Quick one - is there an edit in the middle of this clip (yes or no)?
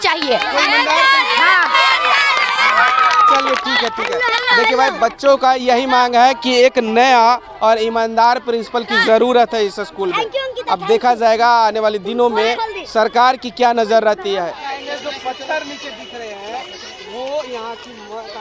no